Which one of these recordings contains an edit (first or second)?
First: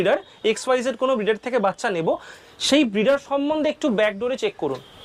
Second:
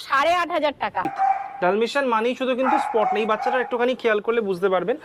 second